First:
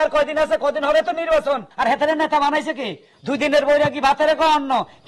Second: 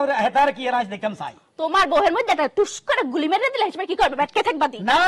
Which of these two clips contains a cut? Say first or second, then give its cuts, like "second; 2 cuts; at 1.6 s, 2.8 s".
first; 1 cut; at 1.7 s